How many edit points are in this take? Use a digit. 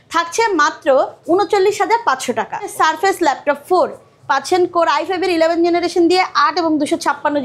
1